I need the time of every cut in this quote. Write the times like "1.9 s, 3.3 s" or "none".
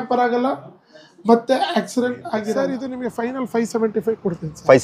2.5 s